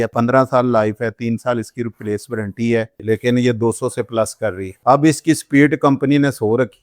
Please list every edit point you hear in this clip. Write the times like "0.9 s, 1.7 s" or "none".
2.9 s

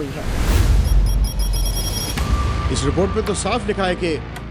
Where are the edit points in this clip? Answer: 2.4 s

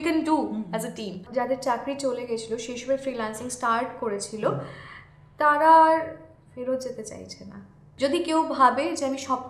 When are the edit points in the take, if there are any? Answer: 1.2 s, 7.8 s

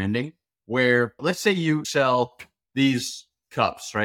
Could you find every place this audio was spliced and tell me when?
1.9 s

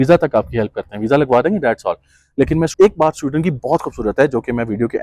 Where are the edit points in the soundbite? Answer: 2.7 s

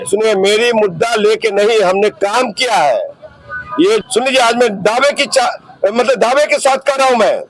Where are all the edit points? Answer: 4.0 s

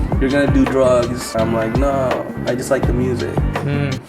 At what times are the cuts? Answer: 1.3 s

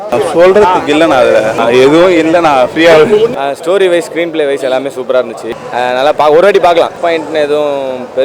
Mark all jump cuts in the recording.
5.4 s, 6.9 s

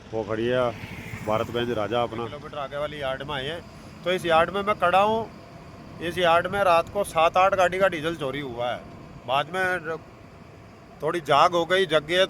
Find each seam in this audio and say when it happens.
2.4 s

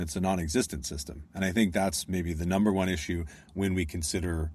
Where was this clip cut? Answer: none

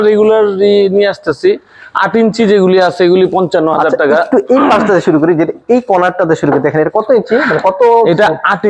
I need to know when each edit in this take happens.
none

